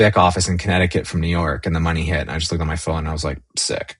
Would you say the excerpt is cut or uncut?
uncut